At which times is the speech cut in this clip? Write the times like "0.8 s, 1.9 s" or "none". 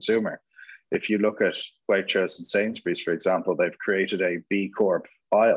none